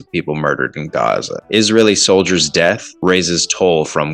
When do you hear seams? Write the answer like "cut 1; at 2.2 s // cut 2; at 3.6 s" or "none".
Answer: cut 1; at 1.3 s // cut 2; at 2.9 s